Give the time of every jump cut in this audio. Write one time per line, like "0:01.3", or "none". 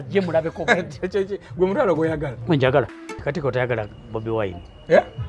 0:03.2